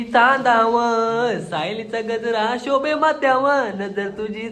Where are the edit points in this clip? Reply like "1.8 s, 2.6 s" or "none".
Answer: none